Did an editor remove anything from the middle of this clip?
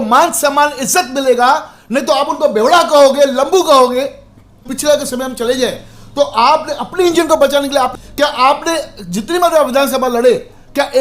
yes; 2 cuts; at 4.7 s, 7.9 s

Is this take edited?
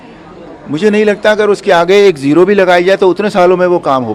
no; 0 cuts

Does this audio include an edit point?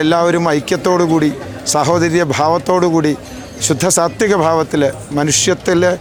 no; 0 cuts

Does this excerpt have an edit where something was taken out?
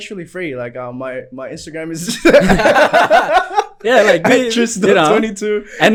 no; 0 cuts

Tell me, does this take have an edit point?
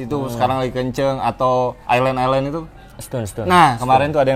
no; 0 cuts

